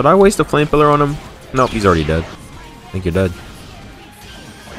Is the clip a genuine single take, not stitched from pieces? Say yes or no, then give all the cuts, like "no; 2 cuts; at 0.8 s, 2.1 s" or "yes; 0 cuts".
no; 1 cut; at 2.4 s